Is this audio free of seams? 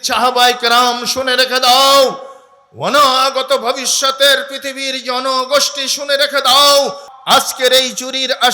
no; 1 cut; at 7.1 s

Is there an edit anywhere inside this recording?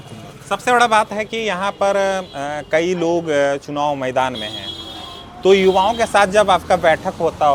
no; 0 cuts

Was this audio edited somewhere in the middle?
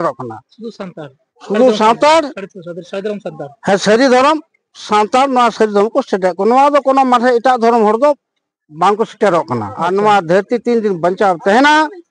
yes; 1 cut; at 9.7 s

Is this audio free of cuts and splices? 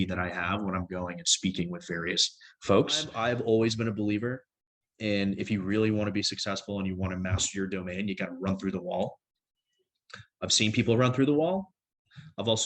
no; 1 cut; at 3.1 s

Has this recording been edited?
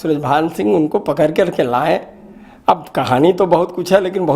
no; 0 cuts

